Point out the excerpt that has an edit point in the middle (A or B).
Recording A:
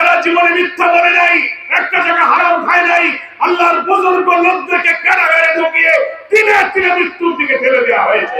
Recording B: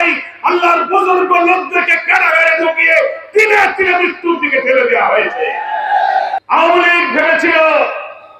B